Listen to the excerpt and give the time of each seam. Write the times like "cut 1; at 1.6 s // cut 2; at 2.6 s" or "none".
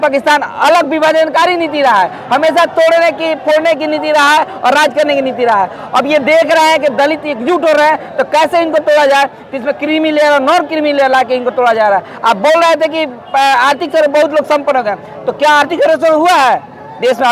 none